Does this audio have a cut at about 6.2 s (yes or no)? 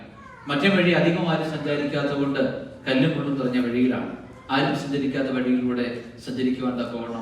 no